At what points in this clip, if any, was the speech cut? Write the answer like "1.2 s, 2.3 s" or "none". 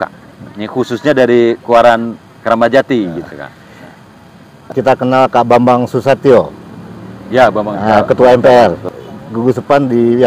4.7 s, 9.0 s